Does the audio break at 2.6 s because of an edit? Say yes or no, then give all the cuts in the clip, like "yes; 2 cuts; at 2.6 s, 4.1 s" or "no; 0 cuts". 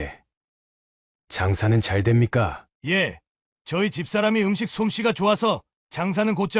yes; 1 cut; at 2.6 s